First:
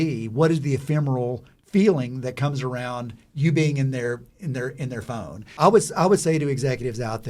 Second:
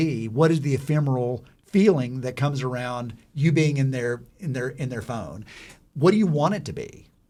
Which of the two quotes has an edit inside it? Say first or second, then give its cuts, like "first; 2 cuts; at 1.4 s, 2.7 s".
first; 1 cut; at 5.6 s